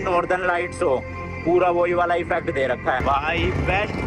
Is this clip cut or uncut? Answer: cut